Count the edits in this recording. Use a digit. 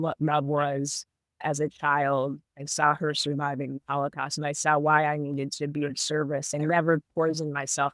1